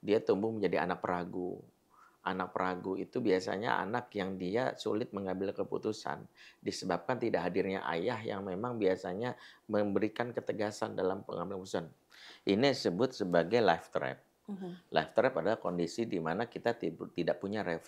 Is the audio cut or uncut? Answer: cut